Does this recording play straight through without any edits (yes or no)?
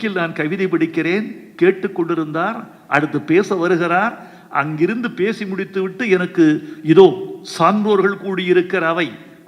yes